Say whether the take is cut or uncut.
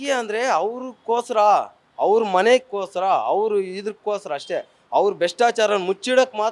uncut